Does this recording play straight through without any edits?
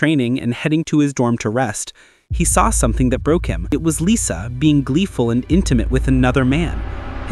yes; 0 cuts

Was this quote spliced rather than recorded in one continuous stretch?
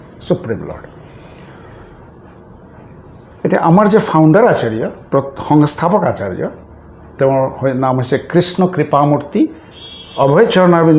no; 0 cuts

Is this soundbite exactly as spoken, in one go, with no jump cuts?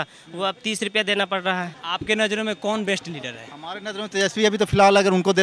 no; 1 cut; at 1.9 s

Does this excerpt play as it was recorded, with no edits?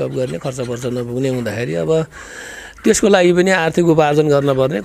yes; 0 cuts

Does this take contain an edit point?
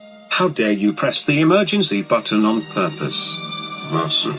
no; 0 cuts

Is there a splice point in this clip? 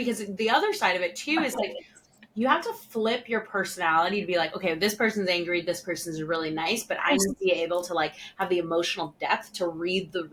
no; 0 cuts

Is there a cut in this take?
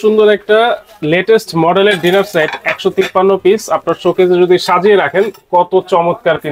no; 0 cuts

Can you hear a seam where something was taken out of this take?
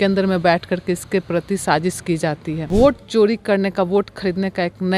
yes; 1 cut; at 2.6 s

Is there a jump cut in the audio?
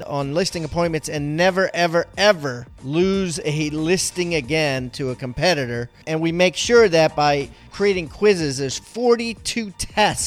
no; 0 cuts

